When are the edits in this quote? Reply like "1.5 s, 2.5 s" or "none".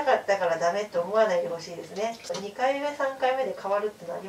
2.3 s